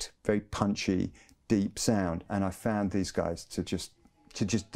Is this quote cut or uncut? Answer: cut